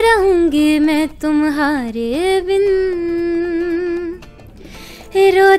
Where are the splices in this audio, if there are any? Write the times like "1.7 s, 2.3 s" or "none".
none

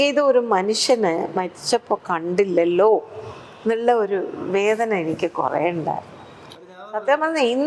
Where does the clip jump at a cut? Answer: none

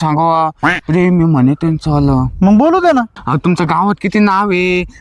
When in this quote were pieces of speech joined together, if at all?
3.2 s

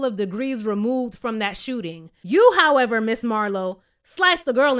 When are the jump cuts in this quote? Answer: none

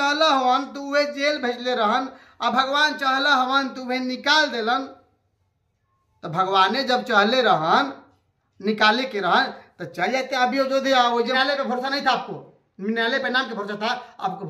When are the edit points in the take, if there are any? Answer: 11.3 s

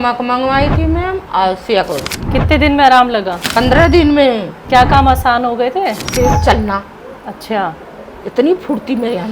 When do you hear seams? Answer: 2.1 s, 3.4 s, 4.5 s, 6.0 s

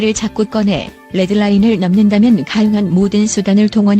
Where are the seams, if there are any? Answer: none

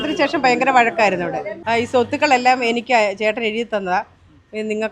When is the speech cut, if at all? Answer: 1.5 s

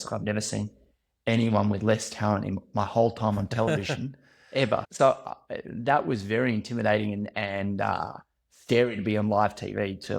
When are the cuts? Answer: 4.9 s

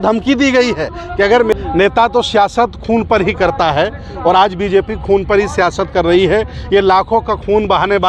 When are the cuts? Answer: 1.5 s

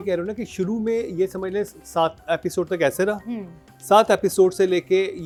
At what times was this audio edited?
none

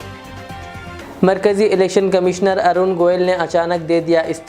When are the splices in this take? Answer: 1.0 s

